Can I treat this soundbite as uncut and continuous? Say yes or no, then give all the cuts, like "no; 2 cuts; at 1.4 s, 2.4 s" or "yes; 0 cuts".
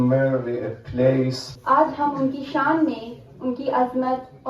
no; 1 cut; at 1.5 s